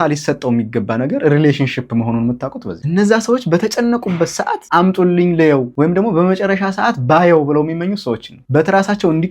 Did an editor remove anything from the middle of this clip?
yes; 1 cut; at 4.6 s

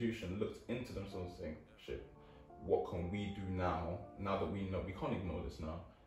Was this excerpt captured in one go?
yes; 0 cuts

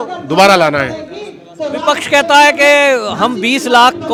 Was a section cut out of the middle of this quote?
no; 0 cuts

